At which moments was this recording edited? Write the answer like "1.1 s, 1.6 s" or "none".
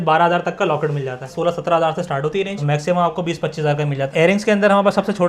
1.3 s, 4.1 s